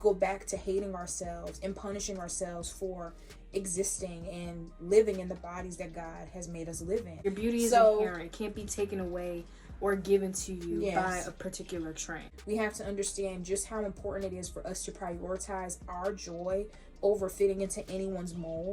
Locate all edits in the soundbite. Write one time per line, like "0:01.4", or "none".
0:07.2
0:12.1